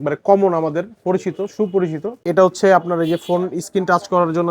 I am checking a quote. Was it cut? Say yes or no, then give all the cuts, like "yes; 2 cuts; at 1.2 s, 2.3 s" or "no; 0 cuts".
yes; 1 cut; at 2.2 s